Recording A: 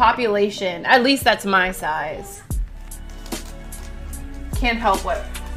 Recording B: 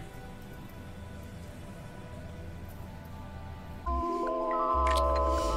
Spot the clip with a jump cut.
B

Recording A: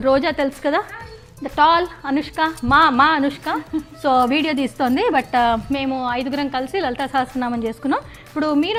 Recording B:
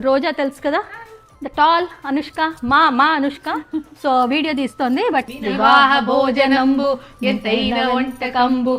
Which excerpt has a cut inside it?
B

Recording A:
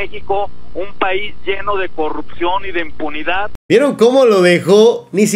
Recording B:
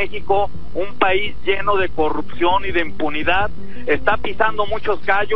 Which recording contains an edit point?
A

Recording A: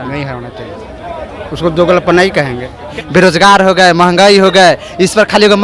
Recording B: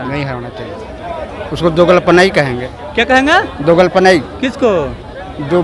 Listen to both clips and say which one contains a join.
A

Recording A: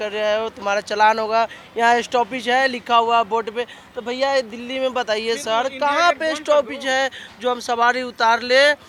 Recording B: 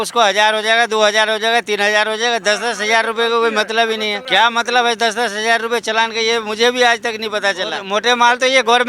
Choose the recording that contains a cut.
B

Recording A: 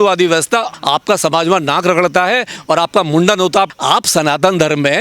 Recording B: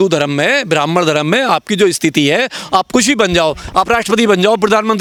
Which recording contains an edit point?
A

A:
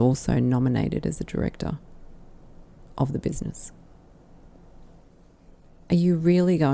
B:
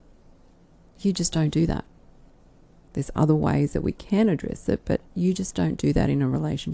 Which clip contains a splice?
A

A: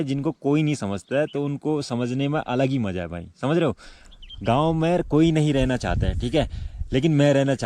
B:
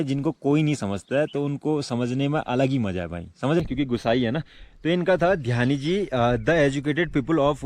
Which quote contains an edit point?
B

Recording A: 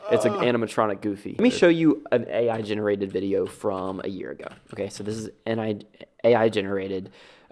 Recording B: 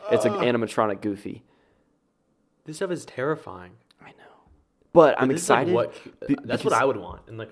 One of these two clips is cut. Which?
A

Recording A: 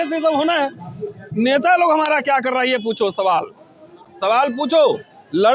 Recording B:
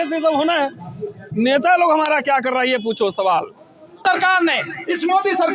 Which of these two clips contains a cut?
B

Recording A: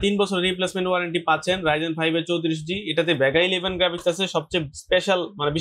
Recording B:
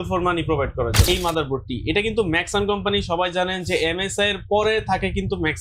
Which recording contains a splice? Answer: B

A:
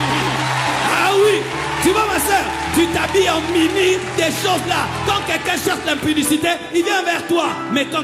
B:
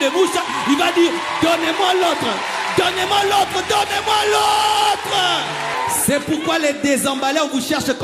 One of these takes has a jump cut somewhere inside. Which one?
B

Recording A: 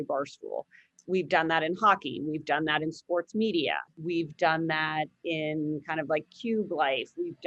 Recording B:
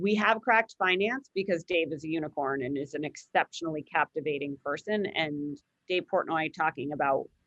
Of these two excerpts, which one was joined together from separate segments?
A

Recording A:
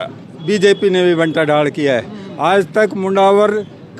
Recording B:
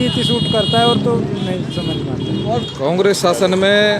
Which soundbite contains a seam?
B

